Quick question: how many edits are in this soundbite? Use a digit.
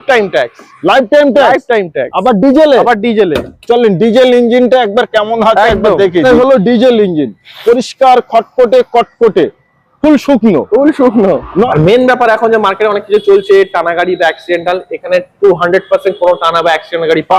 2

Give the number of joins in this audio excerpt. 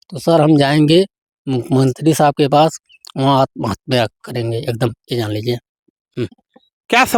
0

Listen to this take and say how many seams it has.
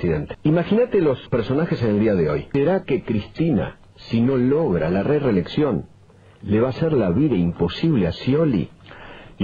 1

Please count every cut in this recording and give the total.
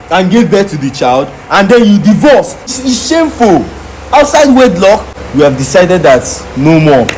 2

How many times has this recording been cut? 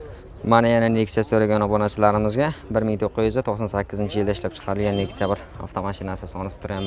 0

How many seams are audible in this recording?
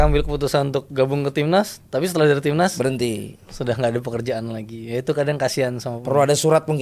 0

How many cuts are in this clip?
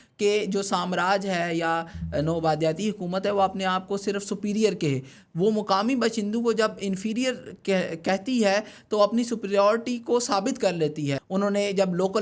1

